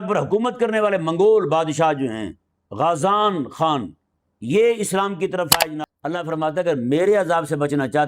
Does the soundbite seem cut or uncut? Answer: cut